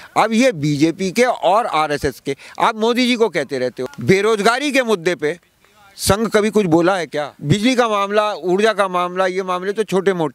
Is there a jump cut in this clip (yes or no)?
yes